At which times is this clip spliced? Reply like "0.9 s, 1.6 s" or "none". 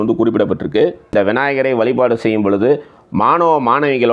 1.1 s